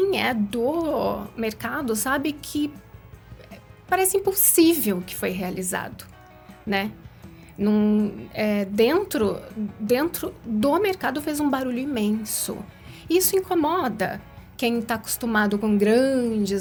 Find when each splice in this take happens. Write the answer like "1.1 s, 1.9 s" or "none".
none